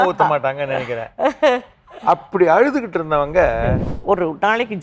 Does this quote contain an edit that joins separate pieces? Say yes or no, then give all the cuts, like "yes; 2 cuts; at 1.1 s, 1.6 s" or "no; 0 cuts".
yes; 1 cut; at 3.9 s